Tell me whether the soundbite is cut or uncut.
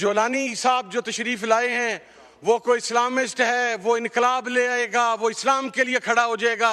uncut